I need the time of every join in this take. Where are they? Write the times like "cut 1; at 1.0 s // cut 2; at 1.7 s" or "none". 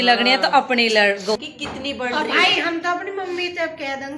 cut 1; at 1.4 s